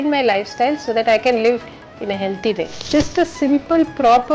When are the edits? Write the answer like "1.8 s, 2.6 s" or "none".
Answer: 2.8 s